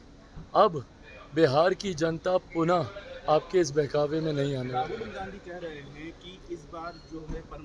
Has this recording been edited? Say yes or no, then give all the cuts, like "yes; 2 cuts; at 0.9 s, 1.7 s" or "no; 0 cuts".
no; 0 cuts